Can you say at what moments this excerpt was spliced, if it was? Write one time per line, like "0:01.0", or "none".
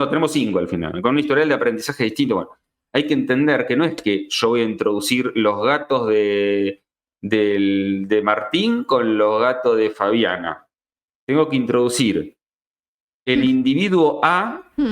none

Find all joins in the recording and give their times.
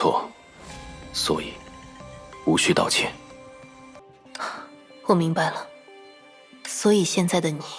0:04.0

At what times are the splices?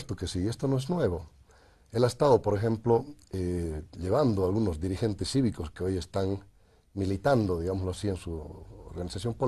none

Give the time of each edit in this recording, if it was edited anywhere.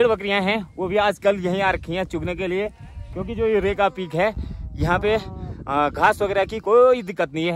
none

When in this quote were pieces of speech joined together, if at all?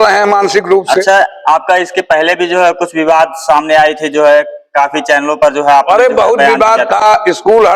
none

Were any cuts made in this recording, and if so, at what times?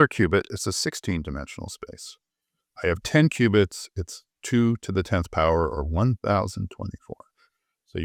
none

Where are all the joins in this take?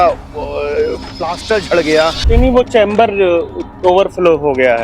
0:02.2

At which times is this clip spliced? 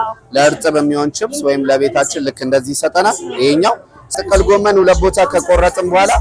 0:04.2

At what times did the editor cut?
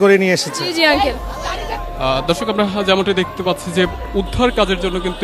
0:01.8

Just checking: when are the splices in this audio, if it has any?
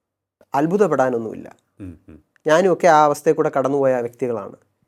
none

